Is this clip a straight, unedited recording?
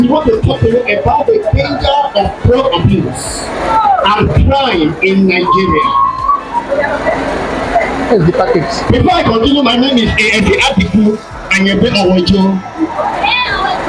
yes; 0 cuts

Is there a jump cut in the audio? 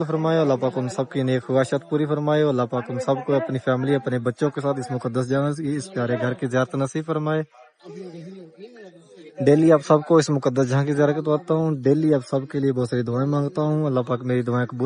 no; 0 cuts

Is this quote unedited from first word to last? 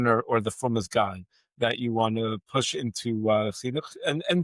yes; 0 cuts

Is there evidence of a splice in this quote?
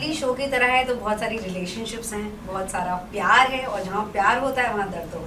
no; 0 cuts

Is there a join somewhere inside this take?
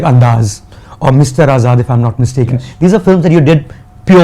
no; 0 cuts

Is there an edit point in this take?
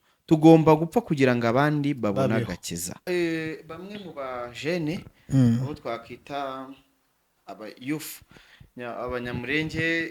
yes; 1 cut; at 3.0 s

